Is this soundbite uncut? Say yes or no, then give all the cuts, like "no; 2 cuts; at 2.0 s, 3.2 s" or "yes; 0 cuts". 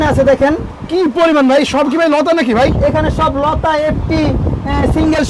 yes; 0 cuts